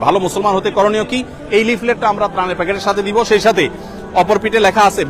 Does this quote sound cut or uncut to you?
uncut